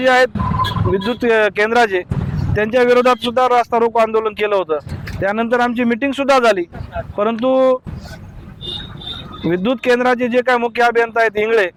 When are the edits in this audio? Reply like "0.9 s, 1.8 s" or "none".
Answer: none